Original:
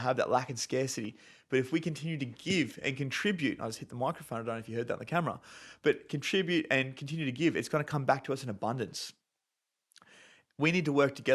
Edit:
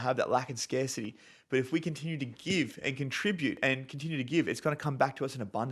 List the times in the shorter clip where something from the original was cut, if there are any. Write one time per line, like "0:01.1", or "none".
0:03.6